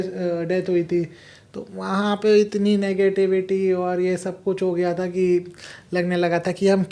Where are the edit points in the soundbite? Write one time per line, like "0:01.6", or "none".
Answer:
none